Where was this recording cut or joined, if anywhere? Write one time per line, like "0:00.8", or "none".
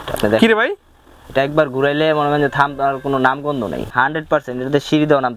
0:03.9